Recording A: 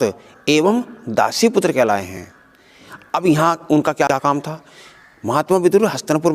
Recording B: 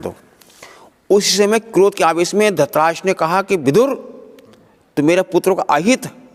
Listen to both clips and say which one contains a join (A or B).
A